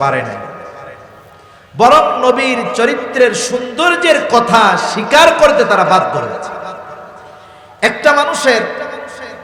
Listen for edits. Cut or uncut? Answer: uncut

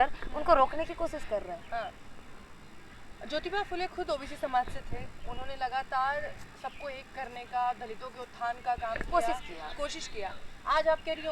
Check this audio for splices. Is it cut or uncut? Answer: uncut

